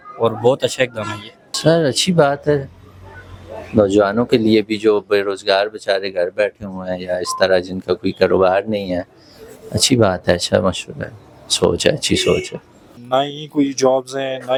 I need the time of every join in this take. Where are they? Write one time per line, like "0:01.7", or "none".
none